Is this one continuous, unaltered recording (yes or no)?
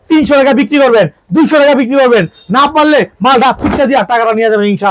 yes